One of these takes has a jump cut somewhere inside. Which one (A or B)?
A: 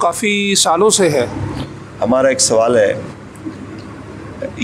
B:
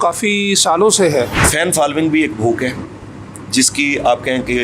B